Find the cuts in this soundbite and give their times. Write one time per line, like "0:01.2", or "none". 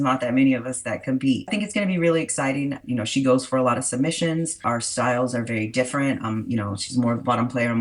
0:01.5
0:02.8
0:04.6